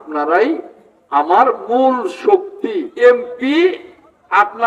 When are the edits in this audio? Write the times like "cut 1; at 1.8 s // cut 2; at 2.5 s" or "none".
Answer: cut 1; at 2.9 s